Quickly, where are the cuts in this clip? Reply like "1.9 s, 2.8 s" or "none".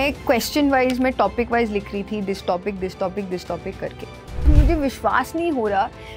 4.5 s